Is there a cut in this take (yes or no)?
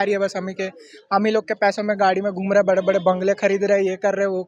no